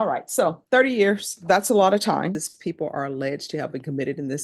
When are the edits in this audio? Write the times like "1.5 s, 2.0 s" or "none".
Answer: 2.5 s